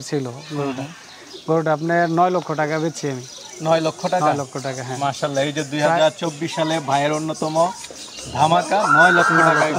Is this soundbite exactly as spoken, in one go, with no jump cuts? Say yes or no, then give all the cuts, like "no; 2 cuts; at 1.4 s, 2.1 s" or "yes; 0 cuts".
yes; 0 cuts